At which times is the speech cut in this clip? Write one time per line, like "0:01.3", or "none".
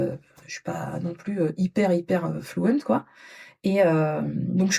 none

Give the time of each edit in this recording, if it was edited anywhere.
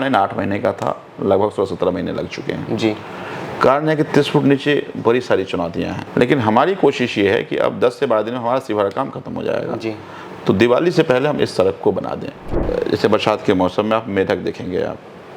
0:06.0
0:12.6

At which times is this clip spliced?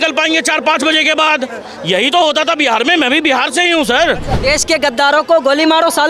0:04.3

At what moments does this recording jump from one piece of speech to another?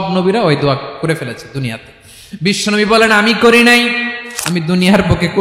0:04.2

